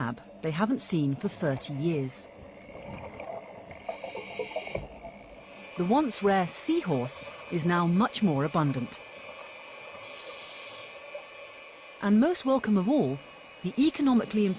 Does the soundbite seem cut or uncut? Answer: uncut